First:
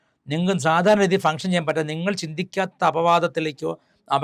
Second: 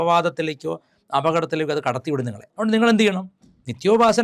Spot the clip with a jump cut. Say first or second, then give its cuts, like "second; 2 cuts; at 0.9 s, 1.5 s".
second; 1 cut; at 2.4 s